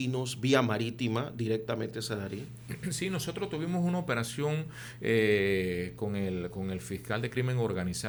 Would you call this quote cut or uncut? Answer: uncut